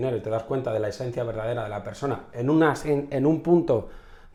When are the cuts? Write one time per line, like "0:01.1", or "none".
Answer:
none